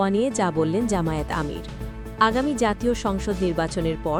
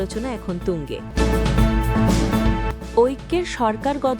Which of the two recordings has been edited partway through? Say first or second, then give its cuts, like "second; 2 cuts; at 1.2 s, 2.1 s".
second; 2 cuts; at 1.0 s, 3.0 s